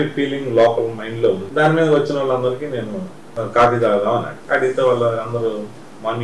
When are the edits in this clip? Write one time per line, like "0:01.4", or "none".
0:01.4
0:03.2
0:04.3

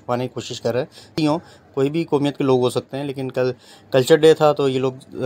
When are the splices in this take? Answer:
0:01.2

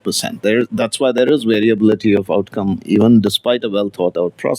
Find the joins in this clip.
none

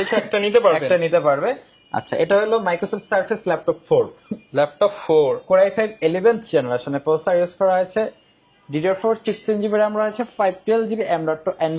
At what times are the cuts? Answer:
none

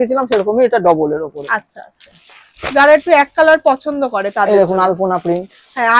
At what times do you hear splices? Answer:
none

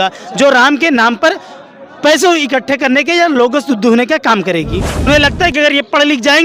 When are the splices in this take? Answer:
0:05.1

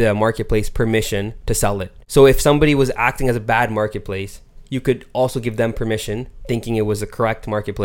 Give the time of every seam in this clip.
0:02.0

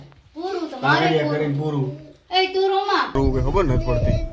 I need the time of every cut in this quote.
0:03.2

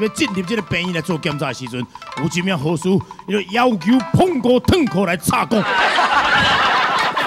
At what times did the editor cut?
none

